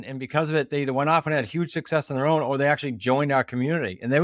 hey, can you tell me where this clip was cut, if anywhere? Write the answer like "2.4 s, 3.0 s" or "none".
none